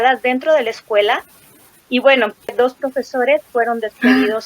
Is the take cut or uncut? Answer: cut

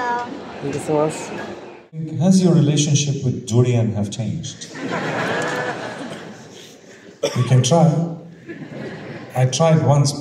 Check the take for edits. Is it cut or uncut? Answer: cut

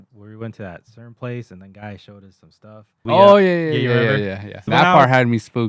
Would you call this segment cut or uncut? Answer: cut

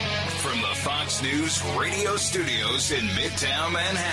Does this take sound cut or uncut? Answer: uncut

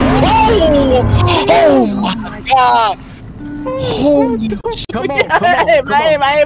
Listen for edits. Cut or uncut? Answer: cut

